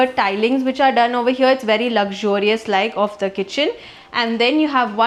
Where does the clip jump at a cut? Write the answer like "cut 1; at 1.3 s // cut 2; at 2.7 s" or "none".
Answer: none